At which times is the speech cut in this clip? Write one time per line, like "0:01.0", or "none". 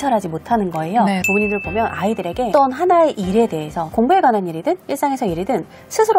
0:01.3
0:02.5
0:03.8